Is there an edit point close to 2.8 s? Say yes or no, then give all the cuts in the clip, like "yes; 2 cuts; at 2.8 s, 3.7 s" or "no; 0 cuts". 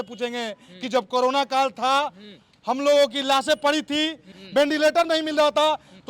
no; 1 cut; at 4.4 s